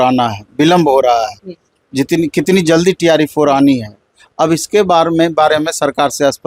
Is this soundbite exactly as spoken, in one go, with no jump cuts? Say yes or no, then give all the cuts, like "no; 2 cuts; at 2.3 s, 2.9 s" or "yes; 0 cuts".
yes; 0 cuts